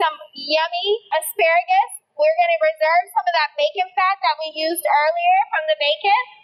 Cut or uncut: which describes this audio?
cut